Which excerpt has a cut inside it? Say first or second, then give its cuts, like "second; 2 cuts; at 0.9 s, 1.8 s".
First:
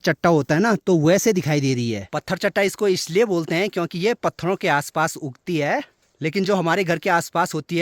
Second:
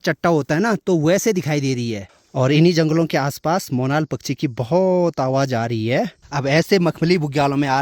second; 2 cuts; at 2.1 s, 6.2 s